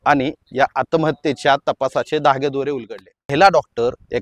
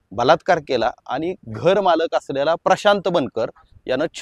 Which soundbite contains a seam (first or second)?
first